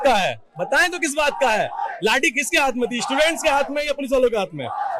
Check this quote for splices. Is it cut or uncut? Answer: uncut